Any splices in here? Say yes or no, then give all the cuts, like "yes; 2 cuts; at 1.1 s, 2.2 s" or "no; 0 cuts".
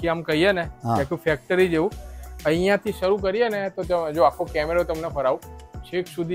no; 0 cuts